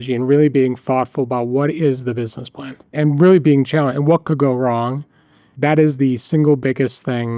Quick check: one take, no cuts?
no; 3 cuts; at 2.9 s, 4.2 s, 5.5 s

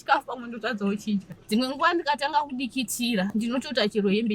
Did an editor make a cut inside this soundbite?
yes; 2 cuts; at 1.4 s, 3.3 s

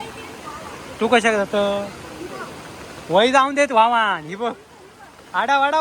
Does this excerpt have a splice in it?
no; 0 cuts

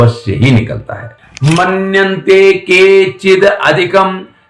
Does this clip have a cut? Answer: yes; 1 cut; at 1.2 s

